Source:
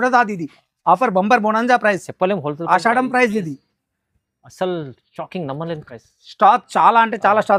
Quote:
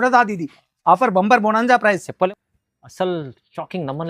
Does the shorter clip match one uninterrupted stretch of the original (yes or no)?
no